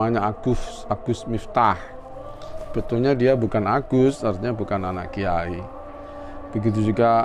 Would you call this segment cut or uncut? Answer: uncut